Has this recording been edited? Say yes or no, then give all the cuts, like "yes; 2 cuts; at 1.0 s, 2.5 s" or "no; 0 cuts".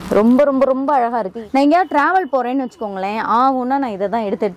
yes; 1 cut; at 1.4 s